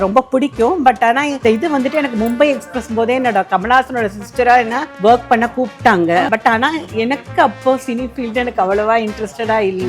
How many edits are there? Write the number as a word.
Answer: three